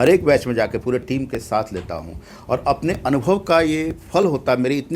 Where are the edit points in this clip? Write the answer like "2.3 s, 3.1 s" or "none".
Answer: none